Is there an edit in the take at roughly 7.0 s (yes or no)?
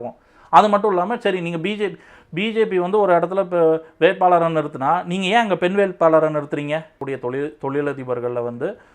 yes